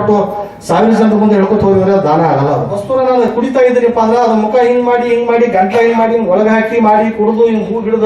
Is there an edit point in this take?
yes; 1 cut; at 3.2 s

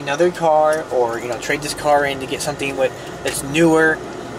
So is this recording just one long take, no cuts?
yes; 0 cuts

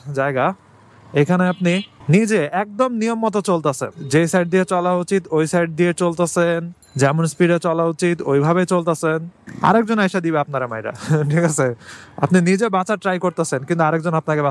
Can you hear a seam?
no; 0 cuts

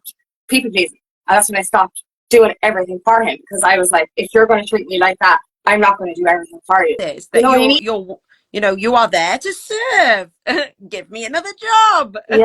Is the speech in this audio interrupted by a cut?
yes; 1 cut; at 7.8 s

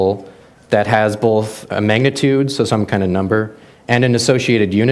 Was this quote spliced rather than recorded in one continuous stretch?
yes; 1 cut; at 3.1 s

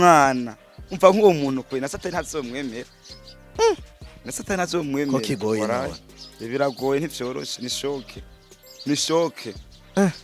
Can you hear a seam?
no; 0 cuts

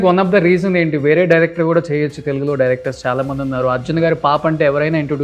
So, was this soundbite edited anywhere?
no; 0 cuts

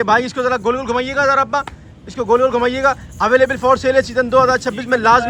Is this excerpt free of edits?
yes; 0 cuts

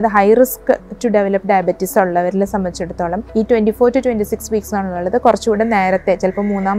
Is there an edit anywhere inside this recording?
yes; 1 cut; at 3.2 s

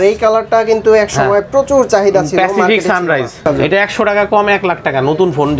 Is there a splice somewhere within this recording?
yes; 1 cut; at 3.4 s

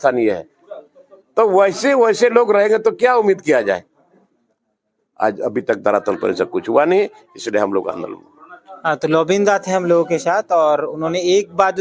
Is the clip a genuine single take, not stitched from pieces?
yes; 0 cuts

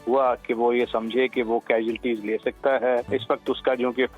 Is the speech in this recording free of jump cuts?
no; 1 cut; at 3.1 s

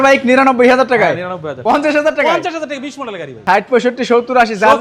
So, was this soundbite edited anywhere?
yes; 2 cuts; at 1.4 s, 3.3 s

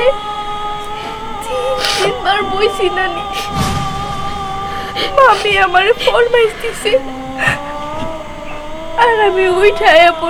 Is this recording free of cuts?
yes; 0 cuts

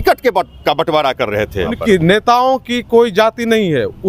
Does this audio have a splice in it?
yes; 1 cut; at 1.8 s

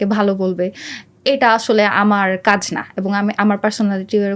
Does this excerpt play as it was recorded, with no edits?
yes; 0 cuts

